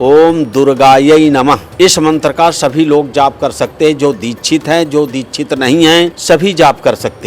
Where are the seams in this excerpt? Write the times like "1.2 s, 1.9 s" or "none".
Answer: 1.7 s, 6.2 s